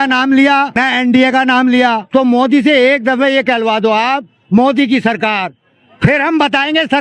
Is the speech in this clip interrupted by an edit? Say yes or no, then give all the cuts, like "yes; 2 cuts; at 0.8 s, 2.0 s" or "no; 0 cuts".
yes; 2 cuts; at 0.8 s, 2.0 s